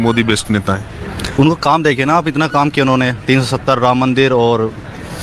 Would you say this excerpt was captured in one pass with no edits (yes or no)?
yes